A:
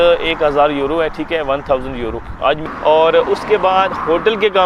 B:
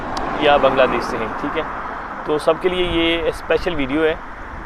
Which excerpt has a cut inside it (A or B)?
A